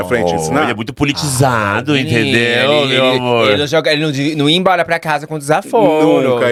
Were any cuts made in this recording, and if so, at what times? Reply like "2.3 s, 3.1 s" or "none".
none